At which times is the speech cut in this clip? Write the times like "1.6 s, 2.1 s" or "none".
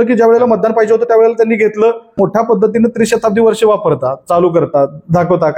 2.1 s